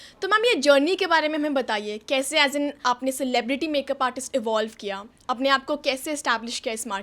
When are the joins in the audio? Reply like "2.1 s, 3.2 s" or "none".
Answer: 2.8 s